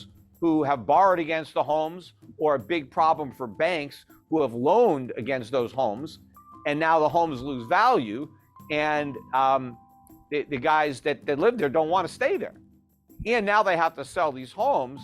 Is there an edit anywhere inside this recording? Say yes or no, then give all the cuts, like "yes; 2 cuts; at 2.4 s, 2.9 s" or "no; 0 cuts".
no; 0 cuts